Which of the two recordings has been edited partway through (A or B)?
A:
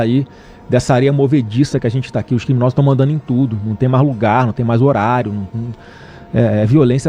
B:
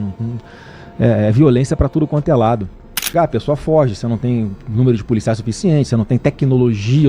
B